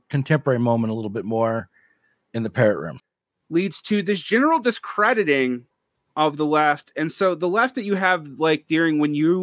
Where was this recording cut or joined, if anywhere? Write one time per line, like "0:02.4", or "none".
0:03.0